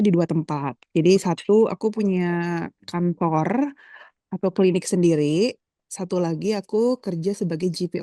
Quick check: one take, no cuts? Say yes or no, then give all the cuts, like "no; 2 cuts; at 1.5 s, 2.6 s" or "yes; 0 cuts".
yes; 0 cuts